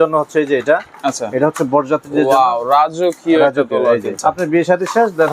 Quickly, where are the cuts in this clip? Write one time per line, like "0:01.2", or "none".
0:04.2